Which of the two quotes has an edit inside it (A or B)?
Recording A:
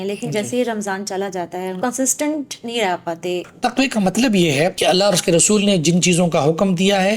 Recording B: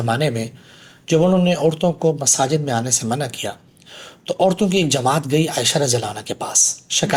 A